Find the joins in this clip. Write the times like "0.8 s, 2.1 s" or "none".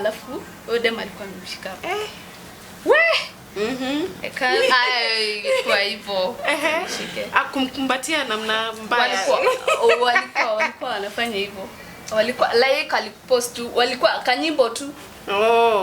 none